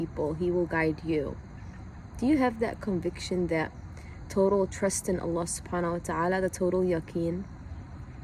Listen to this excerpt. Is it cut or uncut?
uncut